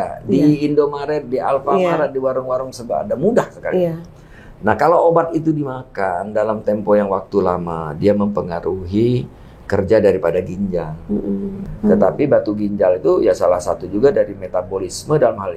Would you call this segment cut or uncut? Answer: cut